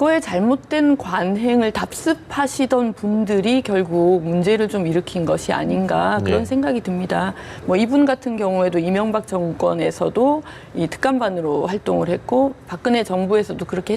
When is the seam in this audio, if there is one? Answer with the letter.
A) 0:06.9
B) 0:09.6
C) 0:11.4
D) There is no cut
D